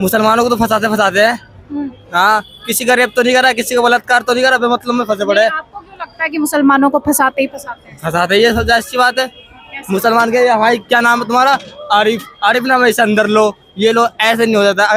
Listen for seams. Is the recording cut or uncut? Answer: uncut